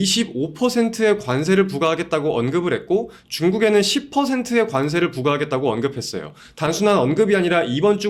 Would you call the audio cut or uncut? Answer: uncut